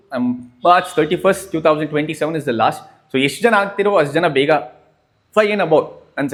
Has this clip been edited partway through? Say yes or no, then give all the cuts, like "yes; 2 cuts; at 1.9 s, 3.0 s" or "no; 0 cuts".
no; 0 cuts